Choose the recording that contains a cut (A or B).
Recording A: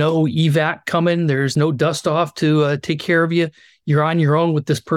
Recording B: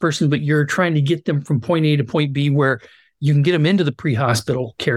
A